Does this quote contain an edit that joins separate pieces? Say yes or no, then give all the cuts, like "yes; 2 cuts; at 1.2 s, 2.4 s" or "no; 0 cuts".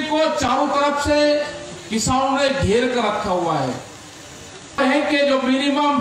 yes; 1 cut; at 4.8 s